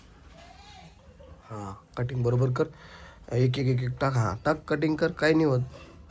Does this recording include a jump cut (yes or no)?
no